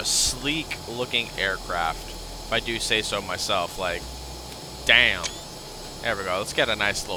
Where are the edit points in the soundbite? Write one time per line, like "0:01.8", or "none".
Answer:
none